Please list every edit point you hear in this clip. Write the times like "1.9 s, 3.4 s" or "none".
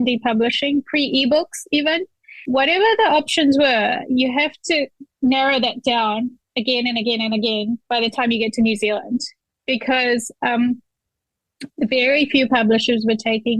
2.1 s, 5.0 s

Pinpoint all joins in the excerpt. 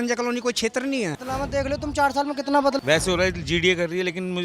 1.2 s, 2.8 s

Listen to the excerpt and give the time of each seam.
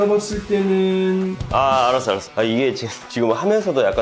1.4 s

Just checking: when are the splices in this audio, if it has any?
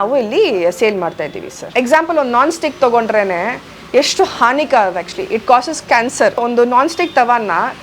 1.7 s, 6.4 s

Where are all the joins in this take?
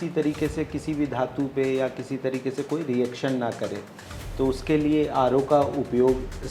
none

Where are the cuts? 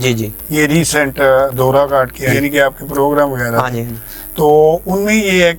2.3 s

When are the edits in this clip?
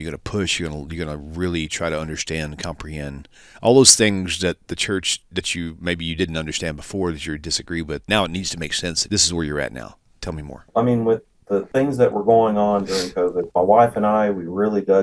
8.0 s, 9.0 s, 10.7 s, 11.7 s, 13.5 s

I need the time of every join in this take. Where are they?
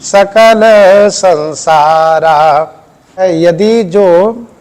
3.2 s

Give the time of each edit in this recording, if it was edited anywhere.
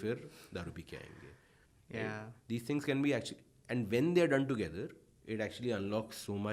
none

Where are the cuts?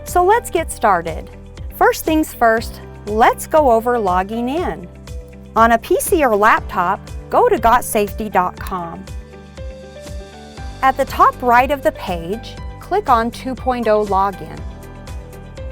9.0 s, 10.7 s

